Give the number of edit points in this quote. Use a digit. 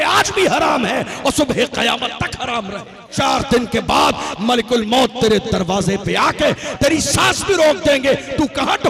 1